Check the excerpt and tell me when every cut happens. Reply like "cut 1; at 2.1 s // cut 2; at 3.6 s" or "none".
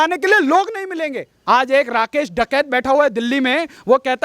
cut 1; at 1.3 s